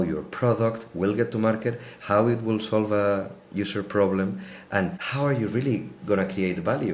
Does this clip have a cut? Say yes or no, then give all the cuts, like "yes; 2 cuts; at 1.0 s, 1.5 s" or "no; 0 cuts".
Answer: no; 0 cuts